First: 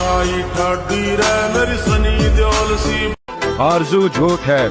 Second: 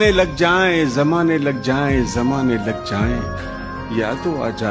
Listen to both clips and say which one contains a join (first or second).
first